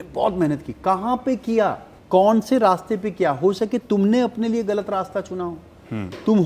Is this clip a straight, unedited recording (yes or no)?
no